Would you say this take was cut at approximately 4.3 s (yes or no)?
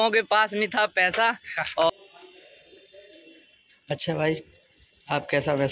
no